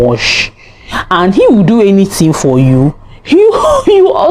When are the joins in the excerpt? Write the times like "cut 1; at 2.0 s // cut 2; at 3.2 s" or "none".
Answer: none